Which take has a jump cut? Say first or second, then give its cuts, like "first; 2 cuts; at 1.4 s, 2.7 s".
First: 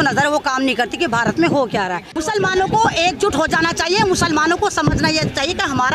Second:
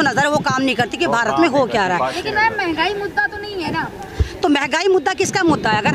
first; 1 cut; at 2.2 s